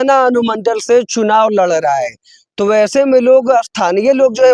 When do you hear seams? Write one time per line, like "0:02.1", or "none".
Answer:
none